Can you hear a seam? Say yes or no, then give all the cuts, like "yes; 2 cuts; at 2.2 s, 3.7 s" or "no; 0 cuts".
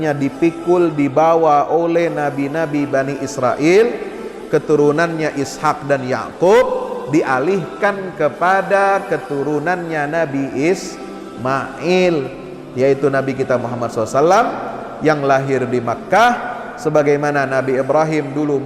no; 0 cuts